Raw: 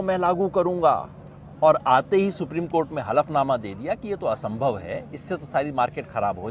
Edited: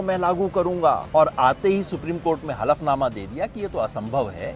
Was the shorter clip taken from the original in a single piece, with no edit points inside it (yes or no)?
no